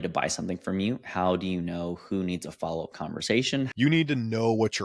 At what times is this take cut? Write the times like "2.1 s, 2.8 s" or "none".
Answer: 3.7 s